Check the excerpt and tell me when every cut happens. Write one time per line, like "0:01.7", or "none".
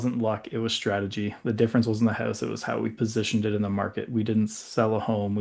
none